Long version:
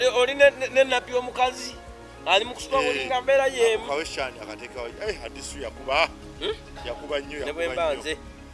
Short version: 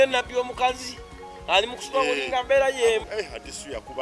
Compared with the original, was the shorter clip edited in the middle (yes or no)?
yes